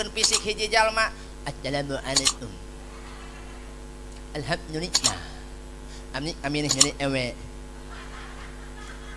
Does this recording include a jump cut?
yes; 1 cut; at 1.3 s

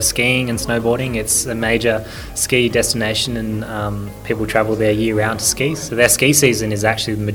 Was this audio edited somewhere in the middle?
no; 0 cuts

